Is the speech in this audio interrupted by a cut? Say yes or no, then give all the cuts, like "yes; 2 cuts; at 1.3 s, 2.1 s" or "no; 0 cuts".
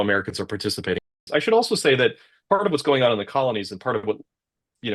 yes; 1 cut; at 1.1 s